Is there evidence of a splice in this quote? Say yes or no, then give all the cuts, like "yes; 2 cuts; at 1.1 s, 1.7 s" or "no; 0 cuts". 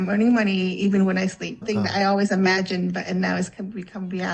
yes; 1 cut; at 1.6 s